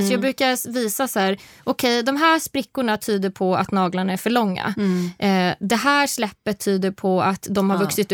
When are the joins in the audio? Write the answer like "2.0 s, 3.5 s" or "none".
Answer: none